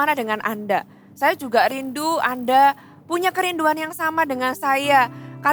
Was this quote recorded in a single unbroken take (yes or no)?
yes